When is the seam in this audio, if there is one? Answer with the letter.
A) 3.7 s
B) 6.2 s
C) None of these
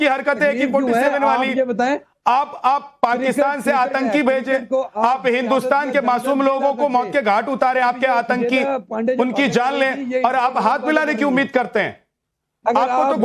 B